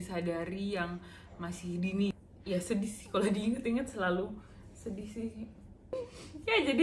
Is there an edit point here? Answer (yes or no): yes